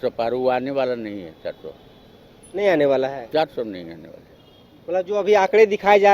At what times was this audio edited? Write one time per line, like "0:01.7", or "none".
none